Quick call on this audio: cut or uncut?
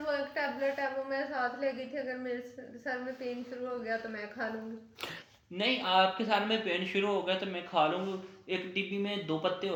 uncut